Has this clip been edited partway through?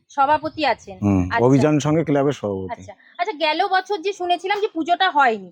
no; 0 cuts

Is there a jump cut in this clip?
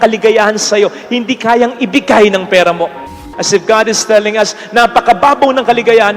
yes; 1 cut; at 3.0 s

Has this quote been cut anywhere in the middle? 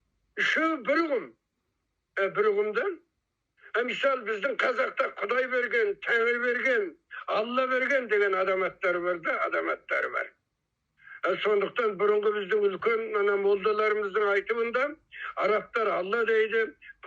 no; 0 cuts

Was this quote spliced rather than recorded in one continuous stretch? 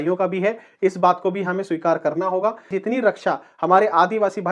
yes; 1 cut; at 2.7 s

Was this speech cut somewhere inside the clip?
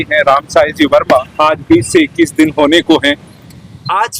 yes; 1 cut; at 1.3 s

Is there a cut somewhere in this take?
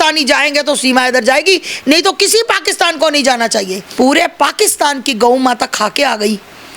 yes; 1 cut; at 3.8 s

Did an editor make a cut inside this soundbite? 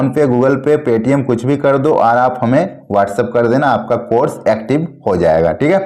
no; 0 cuts

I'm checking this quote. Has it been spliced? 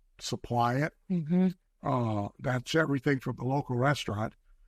no; 0 cuts

